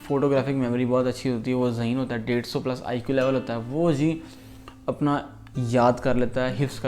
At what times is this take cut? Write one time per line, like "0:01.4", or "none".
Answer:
none